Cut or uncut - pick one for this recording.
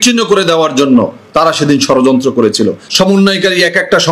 cut